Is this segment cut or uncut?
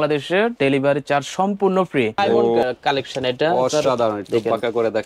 cut